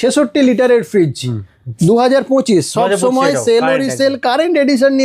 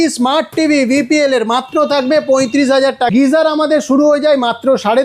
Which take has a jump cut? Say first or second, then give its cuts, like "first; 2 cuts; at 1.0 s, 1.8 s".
second; 1 cut; at 3.1 s